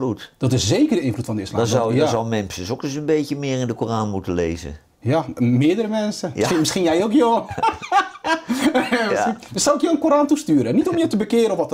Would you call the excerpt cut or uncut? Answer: uncut